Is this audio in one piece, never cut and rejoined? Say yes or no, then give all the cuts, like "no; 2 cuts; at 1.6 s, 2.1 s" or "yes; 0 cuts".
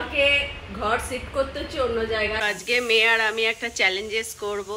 no; 1 cut; at 2.4 s